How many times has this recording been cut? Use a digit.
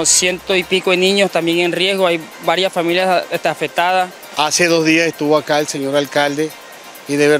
1